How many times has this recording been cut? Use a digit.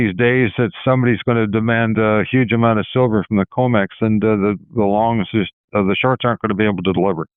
0